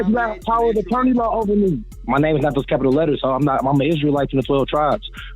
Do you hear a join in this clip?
yes; 1 cut; at 1.9 s

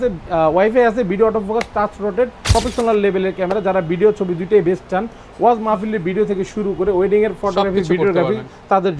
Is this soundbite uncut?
no; 1 cut; at 2.5 s

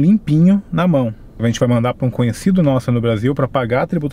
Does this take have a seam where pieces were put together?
yes; 1 cut; at 1.2 s

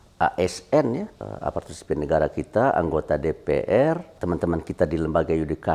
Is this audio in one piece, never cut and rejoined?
no; 2 cuts; at 1.2 s, 4.1 s

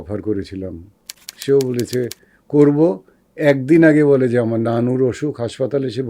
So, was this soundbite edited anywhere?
no; 0 cuts

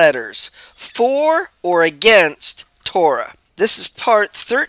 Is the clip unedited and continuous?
no; 1 cut; at 3.8 s

